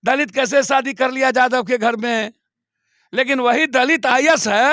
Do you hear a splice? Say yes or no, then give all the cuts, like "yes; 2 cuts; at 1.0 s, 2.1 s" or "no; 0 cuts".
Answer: no; 0 cuts